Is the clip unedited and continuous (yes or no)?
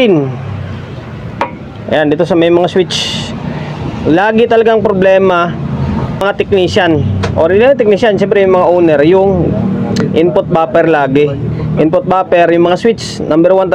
no